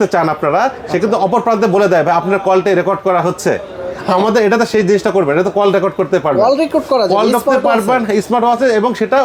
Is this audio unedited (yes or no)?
yes